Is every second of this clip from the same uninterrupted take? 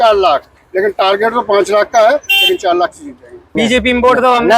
no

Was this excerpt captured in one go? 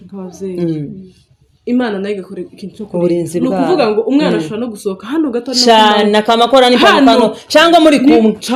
yes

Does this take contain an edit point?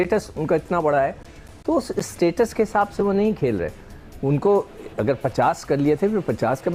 no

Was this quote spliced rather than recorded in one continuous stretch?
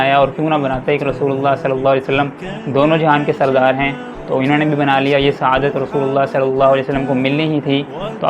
no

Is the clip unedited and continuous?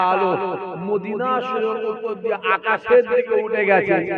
yes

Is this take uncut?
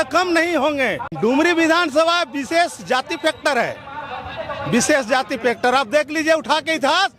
no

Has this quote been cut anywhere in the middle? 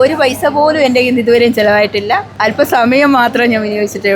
no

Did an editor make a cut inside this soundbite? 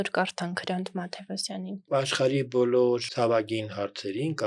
yes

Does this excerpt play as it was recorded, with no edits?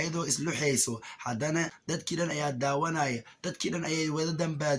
yes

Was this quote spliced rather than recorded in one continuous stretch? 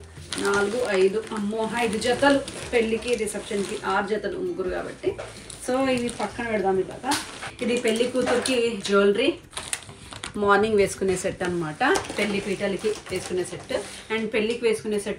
no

